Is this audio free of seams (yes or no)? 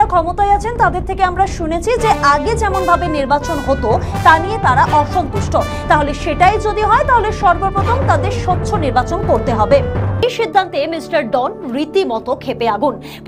no